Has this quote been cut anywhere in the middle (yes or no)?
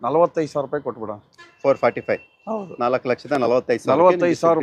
no